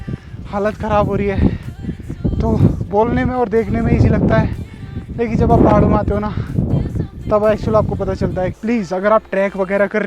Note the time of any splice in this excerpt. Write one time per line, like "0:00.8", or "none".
0:08.6